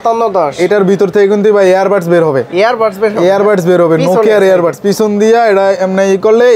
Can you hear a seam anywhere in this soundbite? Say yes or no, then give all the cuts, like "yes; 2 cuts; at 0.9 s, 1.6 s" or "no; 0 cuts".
no; 0 cuts